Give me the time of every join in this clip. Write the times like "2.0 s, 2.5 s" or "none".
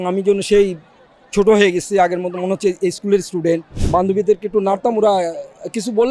3.7 s